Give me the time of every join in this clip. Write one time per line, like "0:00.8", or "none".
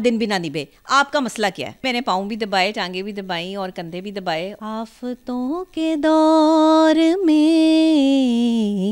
0:01.8
0:04.6